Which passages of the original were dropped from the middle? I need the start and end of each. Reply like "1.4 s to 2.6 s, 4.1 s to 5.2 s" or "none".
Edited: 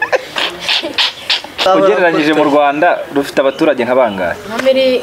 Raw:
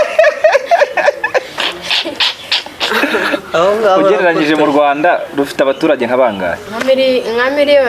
2.9 s to 3.9 s